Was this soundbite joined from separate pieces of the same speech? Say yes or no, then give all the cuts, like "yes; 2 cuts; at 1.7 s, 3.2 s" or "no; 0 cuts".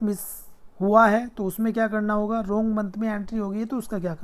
no; 0 cuts